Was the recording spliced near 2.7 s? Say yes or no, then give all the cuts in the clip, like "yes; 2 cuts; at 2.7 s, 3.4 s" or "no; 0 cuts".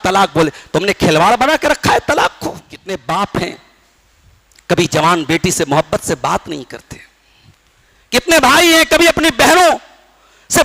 yes; 1 cut; at 2.7 s